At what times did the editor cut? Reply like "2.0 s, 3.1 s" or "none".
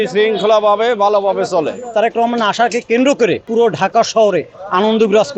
1.9 s, 3.5 s